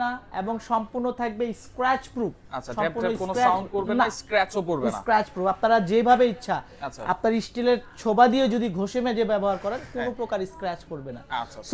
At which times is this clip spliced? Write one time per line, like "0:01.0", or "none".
none